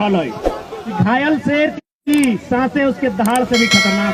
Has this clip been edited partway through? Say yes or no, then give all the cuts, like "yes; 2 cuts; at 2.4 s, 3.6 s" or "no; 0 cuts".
yes; 1 cut; at 0.9 s